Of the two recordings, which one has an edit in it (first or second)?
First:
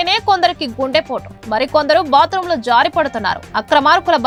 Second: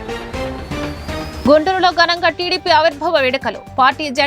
second